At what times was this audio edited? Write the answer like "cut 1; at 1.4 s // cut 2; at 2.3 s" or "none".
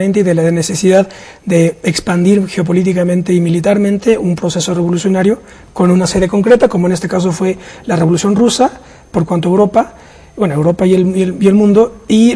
cut 1; at 0.9 s